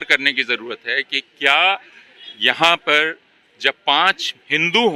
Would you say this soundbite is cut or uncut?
uncut